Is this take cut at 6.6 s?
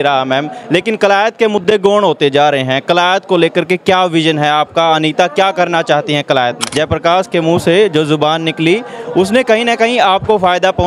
yes; 1 cut; at 6.6 s

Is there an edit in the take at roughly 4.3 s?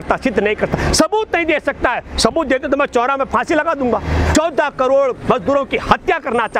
yes; 1 cut; at 4.3 s

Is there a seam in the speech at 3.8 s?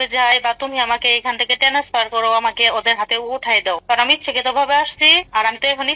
yes; 1 cut; at 3.8 s

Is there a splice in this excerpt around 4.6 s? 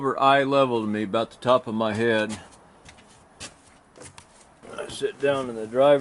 yes; 1 cut; at 4.6 s

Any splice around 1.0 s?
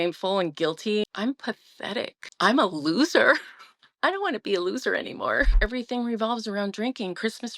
yes; 3 cuts; at 1.0 s, 2.2 s, 5.5 s

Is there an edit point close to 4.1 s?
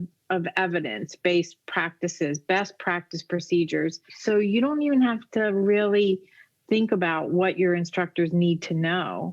yes; 1 cut; at 4.1 s

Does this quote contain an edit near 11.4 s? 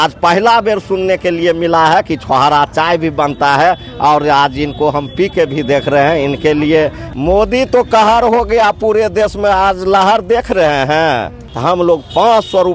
yes; 2 cuts; at 7.0 s, 11.4 s

